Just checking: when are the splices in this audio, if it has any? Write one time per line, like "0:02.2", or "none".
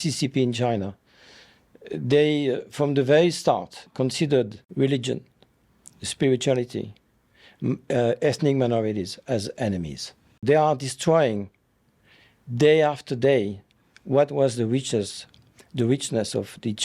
0:04.6
0:10.4